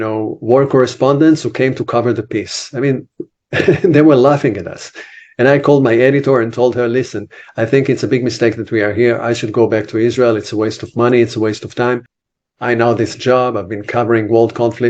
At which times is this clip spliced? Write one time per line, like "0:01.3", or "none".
0:12.1